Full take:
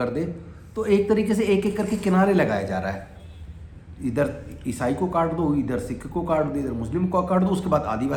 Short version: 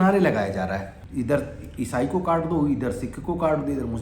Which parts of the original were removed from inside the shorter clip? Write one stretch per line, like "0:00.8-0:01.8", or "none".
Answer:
0:03.1-0:03.8